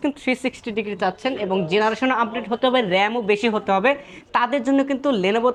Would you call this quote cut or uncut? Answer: uncut